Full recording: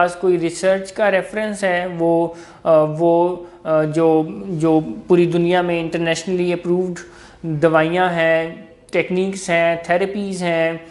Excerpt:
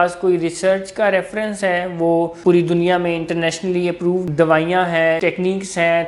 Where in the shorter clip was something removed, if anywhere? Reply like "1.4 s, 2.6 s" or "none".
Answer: 2.3 s, 4.3 s, 5.2 s